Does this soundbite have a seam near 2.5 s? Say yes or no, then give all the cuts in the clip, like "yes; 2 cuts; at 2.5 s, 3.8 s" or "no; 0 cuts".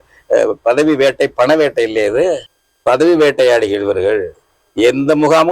yes; 1 cut; at 2.5 s